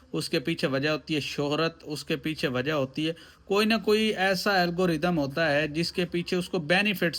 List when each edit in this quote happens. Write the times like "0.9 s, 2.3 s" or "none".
none